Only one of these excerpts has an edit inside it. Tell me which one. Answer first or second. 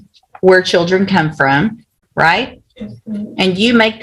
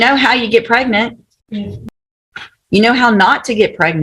second